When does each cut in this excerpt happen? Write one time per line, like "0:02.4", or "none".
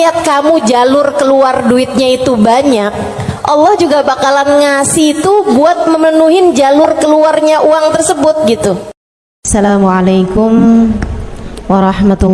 0:09.5

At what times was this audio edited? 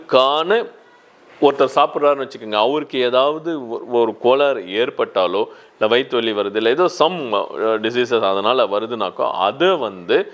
none

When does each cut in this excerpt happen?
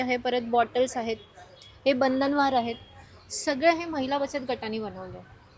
none

